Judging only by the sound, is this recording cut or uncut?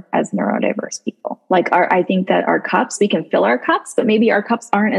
cut